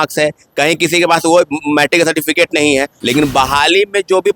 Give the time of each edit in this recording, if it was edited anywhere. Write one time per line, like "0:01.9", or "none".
0:03.0